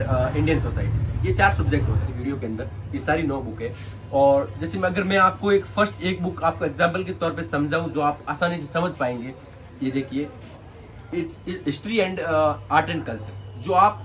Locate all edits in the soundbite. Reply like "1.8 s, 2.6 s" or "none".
2.0 s